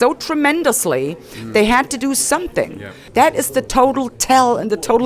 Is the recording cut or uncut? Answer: cut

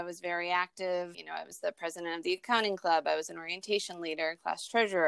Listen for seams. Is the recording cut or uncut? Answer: cut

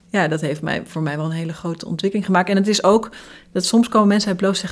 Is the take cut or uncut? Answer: uncut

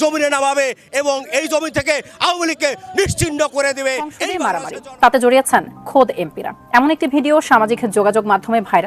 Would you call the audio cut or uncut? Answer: cut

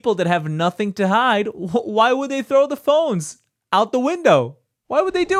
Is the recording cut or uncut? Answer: uncut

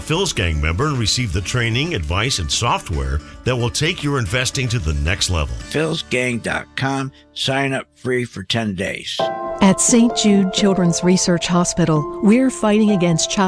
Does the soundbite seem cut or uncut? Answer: cut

